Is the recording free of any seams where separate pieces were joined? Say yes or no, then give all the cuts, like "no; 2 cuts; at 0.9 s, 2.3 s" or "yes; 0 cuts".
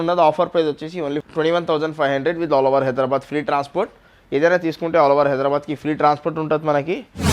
yes; 0 cuts